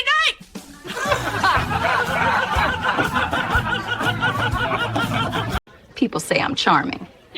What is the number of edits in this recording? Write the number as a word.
zero